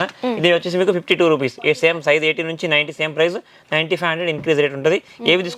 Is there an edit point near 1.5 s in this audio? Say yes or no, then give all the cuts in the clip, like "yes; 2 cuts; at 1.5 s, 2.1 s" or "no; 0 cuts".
no; 0 cuts